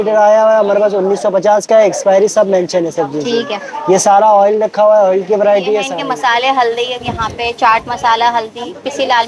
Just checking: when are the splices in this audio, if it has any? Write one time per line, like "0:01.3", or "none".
0:05.9